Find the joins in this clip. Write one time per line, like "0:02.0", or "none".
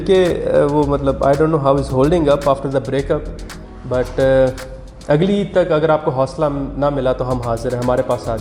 none